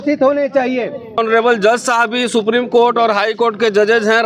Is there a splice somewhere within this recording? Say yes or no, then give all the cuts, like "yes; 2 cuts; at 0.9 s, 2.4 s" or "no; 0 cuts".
yes; 1 cut; at 1.2 s